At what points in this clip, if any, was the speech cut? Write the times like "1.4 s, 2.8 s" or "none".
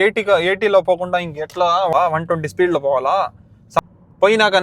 1.9 s, 3.4 s